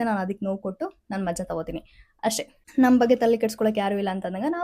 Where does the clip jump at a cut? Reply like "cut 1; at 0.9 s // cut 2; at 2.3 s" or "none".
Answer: cut 1; at 2.6 s